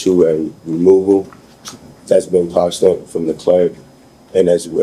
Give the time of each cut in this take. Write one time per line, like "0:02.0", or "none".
none